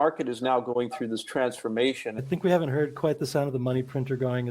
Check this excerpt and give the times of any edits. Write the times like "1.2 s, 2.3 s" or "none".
2.2 s